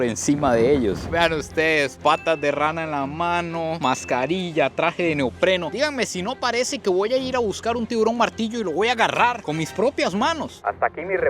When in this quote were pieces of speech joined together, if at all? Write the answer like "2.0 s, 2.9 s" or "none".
1.0 s, 10.5 s